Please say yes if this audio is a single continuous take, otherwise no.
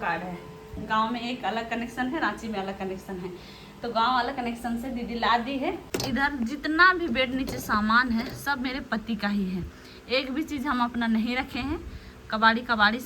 no